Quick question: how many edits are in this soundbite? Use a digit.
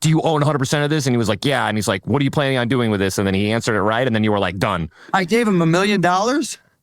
1